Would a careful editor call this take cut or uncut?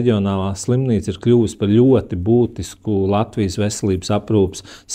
uncut